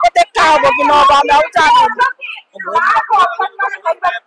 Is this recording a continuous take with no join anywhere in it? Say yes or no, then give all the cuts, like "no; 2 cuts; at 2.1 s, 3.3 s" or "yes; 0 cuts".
yes; 0 cuts